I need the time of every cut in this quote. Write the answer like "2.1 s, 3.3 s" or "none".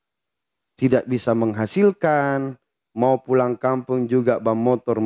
none